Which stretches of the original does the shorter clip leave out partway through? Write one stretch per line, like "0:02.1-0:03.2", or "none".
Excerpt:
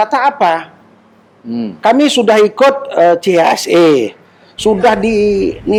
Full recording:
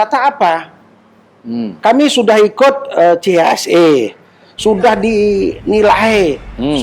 none